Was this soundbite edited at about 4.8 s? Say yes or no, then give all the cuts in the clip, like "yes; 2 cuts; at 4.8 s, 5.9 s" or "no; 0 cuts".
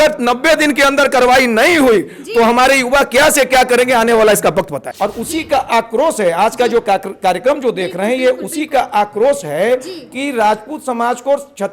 yes; 1 cut; at 4.8 s